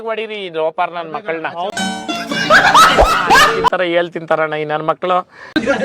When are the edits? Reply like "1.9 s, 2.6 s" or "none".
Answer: 3.7 s